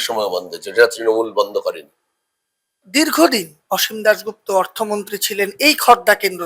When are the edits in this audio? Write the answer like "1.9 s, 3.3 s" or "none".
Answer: 2.8 s